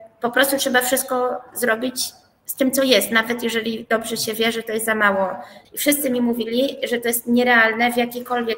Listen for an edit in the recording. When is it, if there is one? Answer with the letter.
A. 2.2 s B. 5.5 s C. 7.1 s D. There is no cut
B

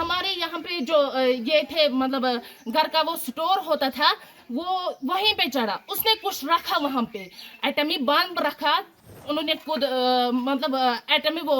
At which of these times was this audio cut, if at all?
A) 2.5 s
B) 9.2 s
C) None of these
B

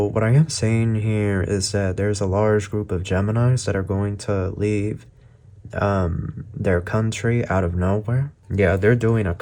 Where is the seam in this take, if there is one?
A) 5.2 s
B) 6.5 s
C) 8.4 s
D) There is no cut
C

